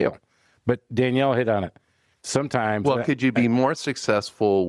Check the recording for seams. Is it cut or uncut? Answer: uncut